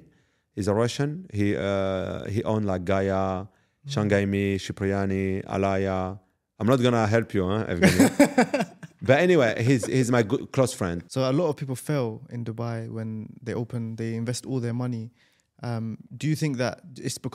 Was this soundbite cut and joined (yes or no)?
yes